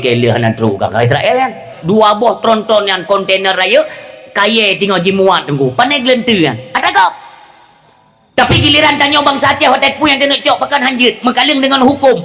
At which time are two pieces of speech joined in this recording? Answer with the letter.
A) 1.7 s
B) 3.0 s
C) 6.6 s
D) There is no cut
A